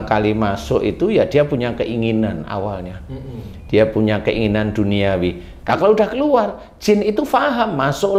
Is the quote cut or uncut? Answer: cut